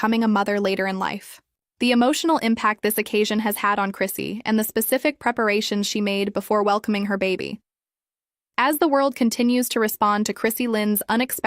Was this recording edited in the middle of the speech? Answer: yes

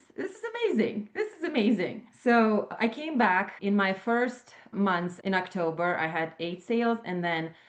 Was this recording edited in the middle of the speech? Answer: yes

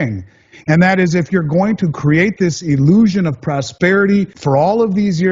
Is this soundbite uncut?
no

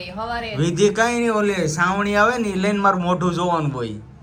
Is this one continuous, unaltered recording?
yes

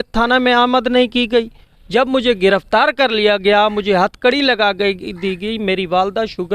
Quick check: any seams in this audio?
no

